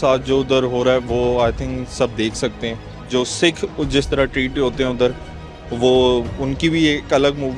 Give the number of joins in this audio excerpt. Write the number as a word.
zero